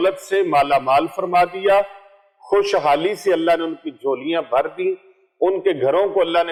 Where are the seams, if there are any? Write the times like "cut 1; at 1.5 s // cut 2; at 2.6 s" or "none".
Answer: none

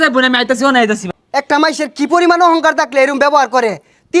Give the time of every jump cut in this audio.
cut 1; at 1.0 s

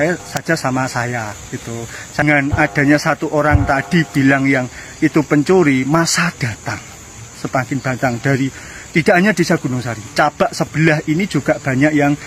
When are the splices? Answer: cut 1; at 2.2 s

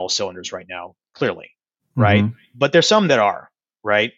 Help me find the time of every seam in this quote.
none

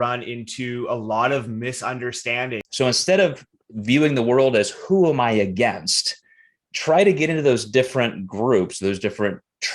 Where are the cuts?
cut 1; at 2.6 s

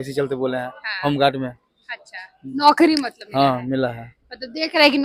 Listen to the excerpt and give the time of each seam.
none

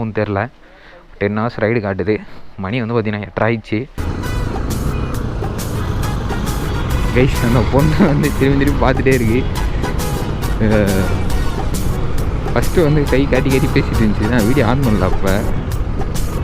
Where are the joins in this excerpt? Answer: cut 1; at 4.0 s

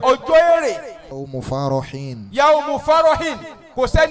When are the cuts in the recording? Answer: cut 1; at 1.0 s

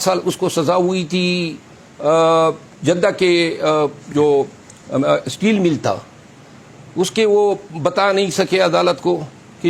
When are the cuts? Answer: none

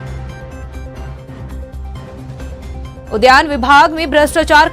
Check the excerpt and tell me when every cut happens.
cut 1; at 1.0 s

